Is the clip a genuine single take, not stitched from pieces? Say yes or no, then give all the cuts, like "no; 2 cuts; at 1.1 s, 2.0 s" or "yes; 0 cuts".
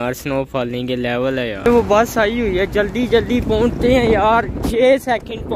no; 1 cut; at 1.6 s